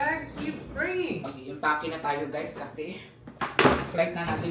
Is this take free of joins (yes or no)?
yes